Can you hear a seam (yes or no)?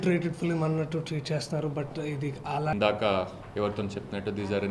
yes